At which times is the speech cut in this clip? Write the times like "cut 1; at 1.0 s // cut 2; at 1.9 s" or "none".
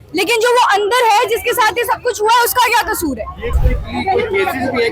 cut 1; at 3.7 s

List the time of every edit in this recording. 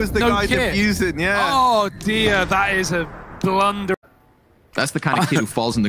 cut 1; at 3.9 s

